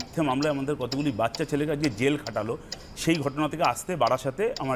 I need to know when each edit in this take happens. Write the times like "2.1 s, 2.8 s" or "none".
none